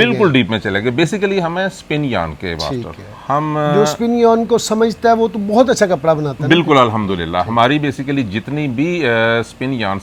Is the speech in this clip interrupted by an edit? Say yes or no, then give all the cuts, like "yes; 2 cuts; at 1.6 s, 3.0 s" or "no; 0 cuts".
no; 0 cuts